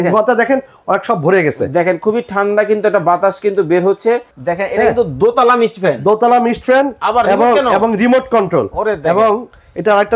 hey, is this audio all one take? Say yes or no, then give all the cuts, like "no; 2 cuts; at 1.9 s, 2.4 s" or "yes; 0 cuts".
no; 1 cut; at 4.4 s